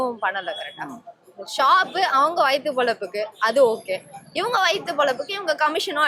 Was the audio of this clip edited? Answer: no; 0 cuts

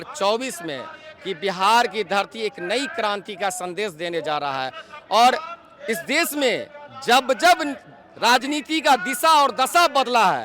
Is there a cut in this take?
no; 0 cuts

